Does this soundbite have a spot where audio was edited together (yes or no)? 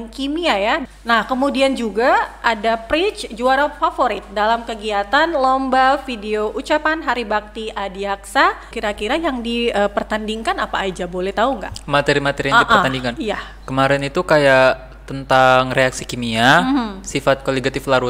yes